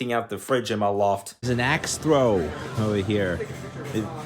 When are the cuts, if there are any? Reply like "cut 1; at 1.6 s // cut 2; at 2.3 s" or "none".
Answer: cut 1; at 1.5 s